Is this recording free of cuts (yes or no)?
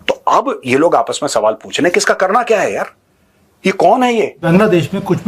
no